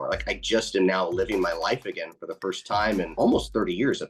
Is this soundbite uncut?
no; 1 cut; at 3.1 s

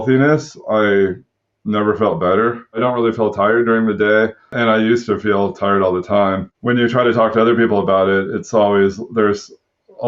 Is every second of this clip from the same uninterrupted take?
no; 3 cuts; at 2.8 s, 4.5 s, 6.5 s

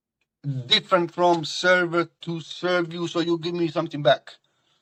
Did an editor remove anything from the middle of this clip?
no; 0 cuts

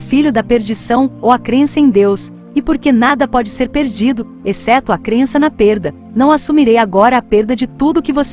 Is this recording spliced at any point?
no; 0 cuts

